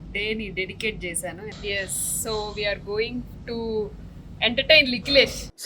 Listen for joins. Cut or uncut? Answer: cut